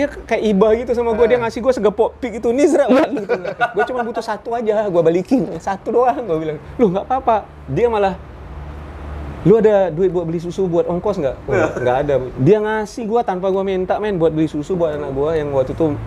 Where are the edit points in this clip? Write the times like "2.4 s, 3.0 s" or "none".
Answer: none